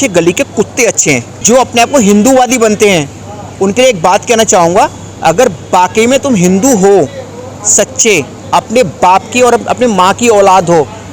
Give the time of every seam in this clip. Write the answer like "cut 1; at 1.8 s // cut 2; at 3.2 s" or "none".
cut 1; at 1.3 s